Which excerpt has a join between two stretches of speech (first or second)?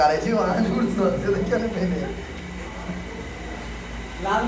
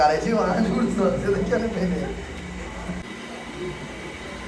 second